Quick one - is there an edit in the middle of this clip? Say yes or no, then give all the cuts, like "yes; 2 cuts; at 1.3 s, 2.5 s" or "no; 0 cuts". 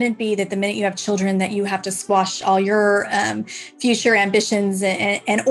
no; 0 cuts